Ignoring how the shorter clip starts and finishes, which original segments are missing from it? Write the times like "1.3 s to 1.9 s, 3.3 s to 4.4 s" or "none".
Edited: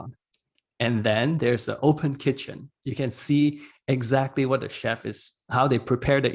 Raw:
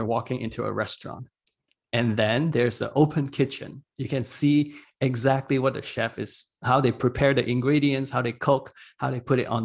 none

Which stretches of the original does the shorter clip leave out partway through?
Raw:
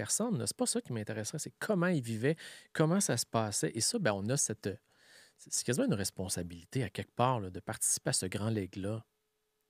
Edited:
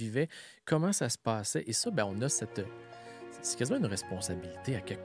none

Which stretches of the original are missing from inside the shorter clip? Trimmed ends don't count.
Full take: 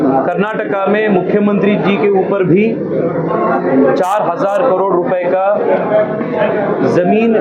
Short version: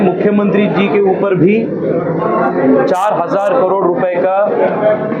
none

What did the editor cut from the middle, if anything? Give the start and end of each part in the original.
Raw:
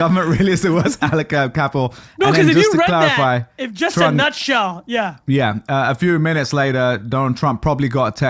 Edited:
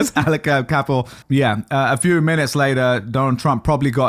2.0 s to 5.2 s

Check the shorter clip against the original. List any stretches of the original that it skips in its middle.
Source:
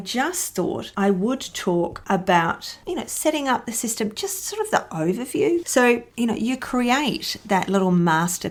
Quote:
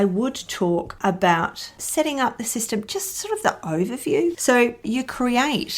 2.8 s to 3.1 s, 6.1 s to 6.4 s

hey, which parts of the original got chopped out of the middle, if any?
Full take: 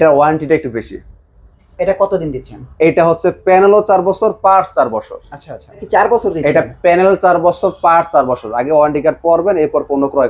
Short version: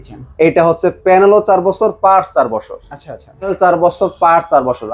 5.9 s to 7.1 s

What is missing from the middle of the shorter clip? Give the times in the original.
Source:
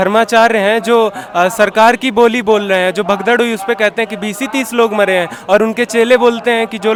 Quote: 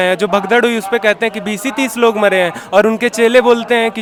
none

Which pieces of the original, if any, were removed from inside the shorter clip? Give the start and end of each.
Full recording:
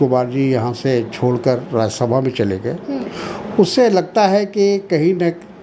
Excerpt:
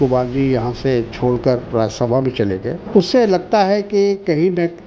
2.8 s to 3.4 s

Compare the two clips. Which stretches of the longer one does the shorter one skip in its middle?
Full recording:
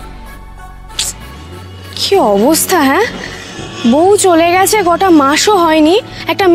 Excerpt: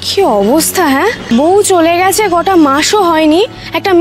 3.1 s to 3.7 s

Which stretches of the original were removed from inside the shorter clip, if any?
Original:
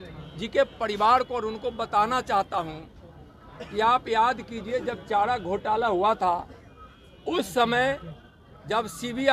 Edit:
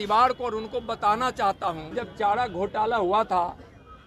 2.9 s to 4.9 s

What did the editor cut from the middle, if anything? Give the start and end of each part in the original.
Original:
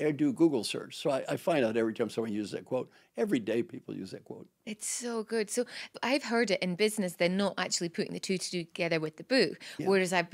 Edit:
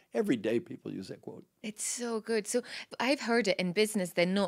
none

